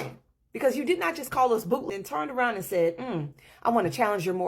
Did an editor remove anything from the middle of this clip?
yes; 1 cut; at 1.8 s

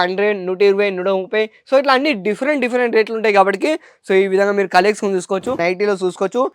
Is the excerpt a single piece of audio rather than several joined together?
no; 1 cut; at 5.6 s

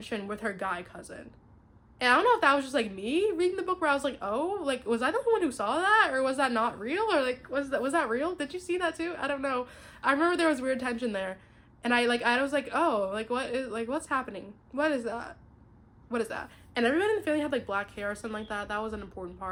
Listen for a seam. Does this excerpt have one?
no; 0 cuts

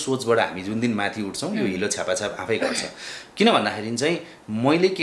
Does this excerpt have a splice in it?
no; 0 cuts

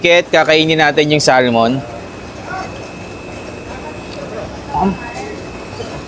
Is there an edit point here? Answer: no; 0 cuts

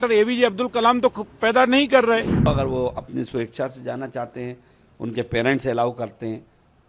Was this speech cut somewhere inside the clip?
yes; 1 cut; at 2.5 s

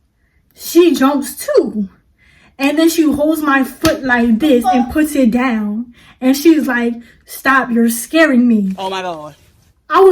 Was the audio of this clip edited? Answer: no; 0 cuts

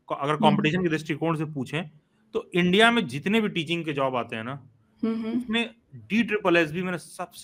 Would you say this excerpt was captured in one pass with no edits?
yes; 0 cuts

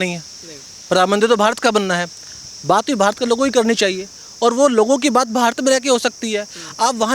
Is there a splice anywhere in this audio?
no; 0 cuts

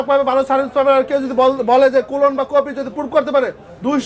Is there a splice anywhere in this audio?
no; 0 cuts

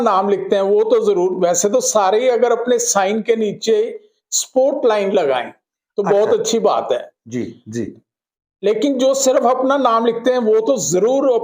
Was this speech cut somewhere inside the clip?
no; 0 cuts

